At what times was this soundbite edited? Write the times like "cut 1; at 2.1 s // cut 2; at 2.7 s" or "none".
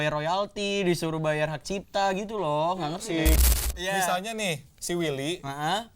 cut 1; at 3.5 s

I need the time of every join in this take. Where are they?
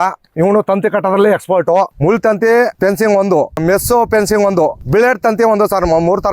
cut 1; at 1.9 s // cut 2; at 2.7 s // cut 3; at 4.8 s

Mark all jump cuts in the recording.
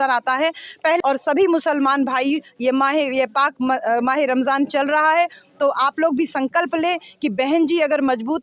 cut 1; at 1.0 s

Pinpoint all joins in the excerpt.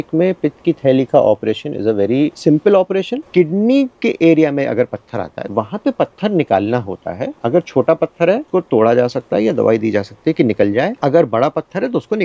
cut 1; at 2.4 s // cut 2; at 3.2 s // cut 3; at 5.4 s // cut 4; at 7.3 s // cut 5; at 8.5 s // cut 6; at 11.0 s

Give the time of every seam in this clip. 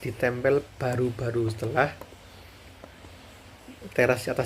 none

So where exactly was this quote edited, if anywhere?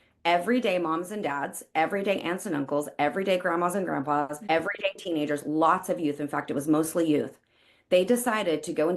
cut 1; at 4.4 s

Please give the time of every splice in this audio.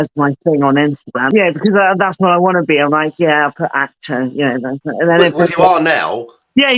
cut 1; at 1.3 s

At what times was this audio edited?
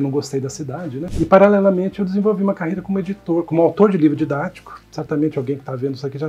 cut 1; at 1.1 s

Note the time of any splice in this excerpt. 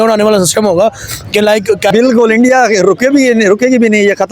cut 1; at 1.9 s

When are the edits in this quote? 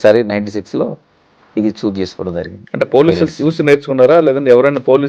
cut 1; at 2.6 s

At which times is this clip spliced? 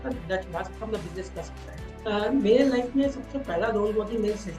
cut 1; at 1.9 s

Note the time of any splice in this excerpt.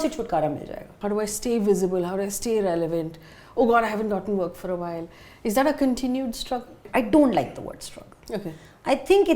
cut 1; at 1.0 s // cut 2; at 6.8 s

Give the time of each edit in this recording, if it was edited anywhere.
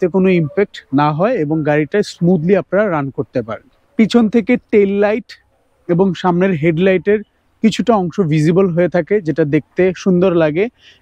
none

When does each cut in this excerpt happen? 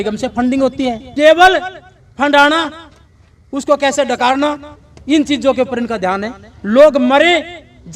cut 1; at 1.0 s

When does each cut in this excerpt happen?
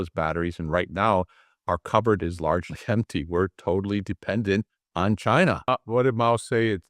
cut 1; at 4.8 s // cut 2; at 5.6 s

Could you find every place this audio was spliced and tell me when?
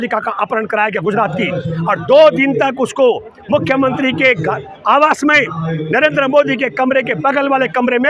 none

